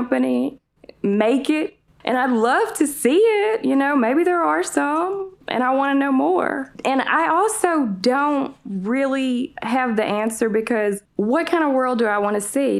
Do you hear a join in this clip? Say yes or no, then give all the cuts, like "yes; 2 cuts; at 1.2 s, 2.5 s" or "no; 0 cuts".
yes; 3 cuts; at 1.8 s, 6.7 s, 11.1 s